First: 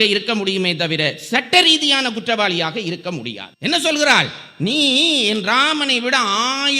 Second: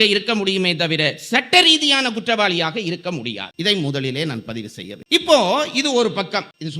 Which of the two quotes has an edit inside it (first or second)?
first